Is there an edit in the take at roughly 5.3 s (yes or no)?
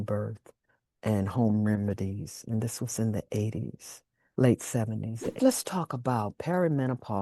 yes